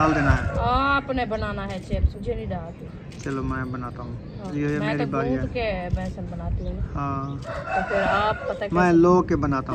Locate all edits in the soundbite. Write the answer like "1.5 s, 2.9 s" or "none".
2.2 s, 4.5 s, 6.8 s